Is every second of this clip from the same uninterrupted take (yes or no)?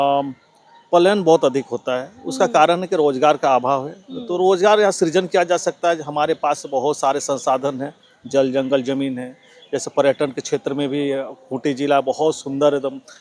yes